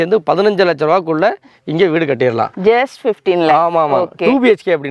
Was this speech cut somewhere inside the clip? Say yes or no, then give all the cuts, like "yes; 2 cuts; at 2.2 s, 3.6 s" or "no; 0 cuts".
no; 0 cuts